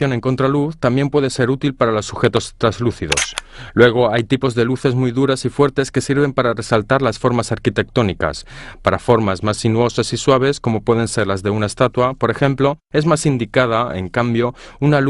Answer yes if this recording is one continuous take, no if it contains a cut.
no